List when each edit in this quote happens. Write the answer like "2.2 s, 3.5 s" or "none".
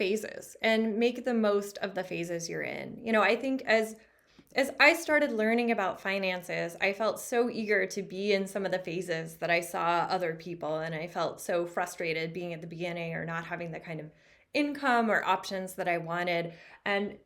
none